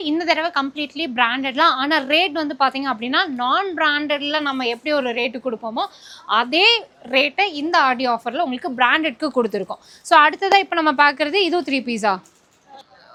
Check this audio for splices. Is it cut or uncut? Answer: uncut